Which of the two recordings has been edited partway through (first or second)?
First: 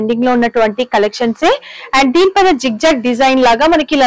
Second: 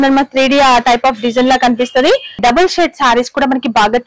second